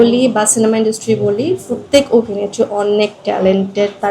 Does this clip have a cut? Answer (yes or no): yes